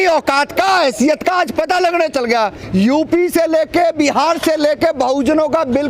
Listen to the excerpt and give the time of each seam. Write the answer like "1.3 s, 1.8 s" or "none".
2.6 s